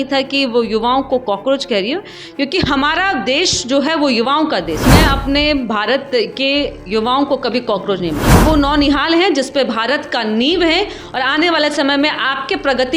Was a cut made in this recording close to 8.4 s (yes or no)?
yes